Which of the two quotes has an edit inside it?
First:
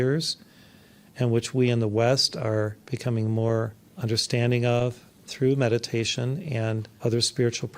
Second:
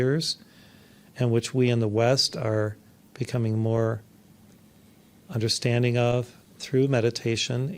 first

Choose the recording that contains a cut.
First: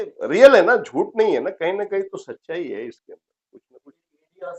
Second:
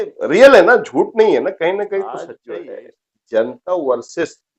second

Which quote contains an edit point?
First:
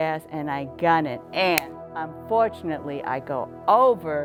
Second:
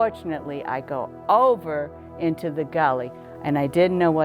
second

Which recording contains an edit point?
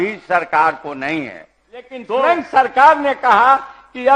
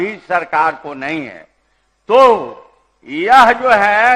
first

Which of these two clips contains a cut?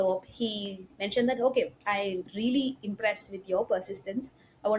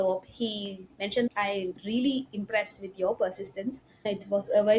second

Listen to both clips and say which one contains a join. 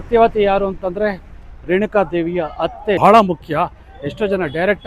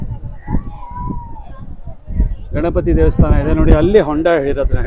first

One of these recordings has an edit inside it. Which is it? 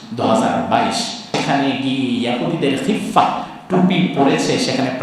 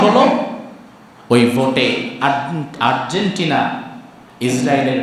first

